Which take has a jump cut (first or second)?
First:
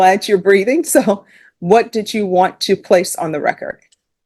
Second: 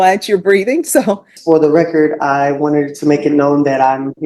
second